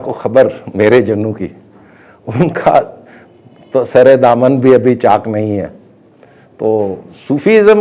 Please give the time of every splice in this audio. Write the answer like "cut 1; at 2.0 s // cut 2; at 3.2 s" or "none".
none